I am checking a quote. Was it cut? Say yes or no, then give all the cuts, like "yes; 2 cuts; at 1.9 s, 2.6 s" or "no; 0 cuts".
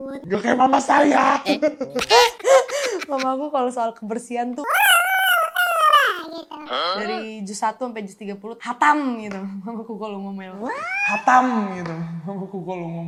no; 0 cuts